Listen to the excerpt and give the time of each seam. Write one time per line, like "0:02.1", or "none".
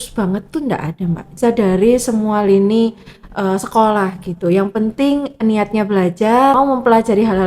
0:01.4
0:06.6